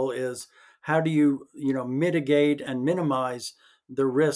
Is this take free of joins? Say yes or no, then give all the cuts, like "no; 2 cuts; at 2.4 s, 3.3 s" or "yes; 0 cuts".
no; 1 cut; at 2.6 s